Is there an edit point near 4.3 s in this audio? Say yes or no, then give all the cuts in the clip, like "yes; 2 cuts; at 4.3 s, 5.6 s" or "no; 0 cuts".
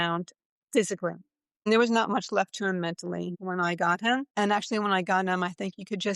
yes; 3 cuts; at 1.7 s, 3.3 s, 4.3 s